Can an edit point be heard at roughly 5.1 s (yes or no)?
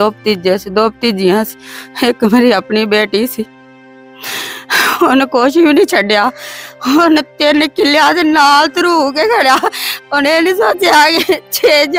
no